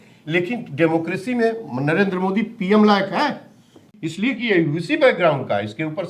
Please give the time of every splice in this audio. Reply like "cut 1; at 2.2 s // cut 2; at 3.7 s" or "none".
cut 1; at 3.9 s